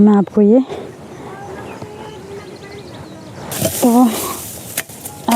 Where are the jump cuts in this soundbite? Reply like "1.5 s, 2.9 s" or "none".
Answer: 3.5 s